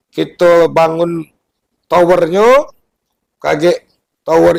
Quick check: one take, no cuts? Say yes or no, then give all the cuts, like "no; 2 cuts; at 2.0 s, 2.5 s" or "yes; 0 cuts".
yes; 0 cuts